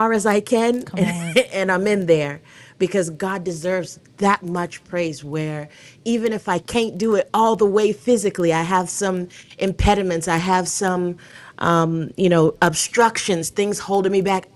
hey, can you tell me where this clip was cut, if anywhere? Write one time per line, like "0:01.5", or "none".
none